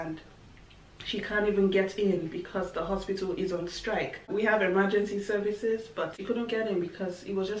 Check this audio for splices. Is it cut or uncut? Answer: cut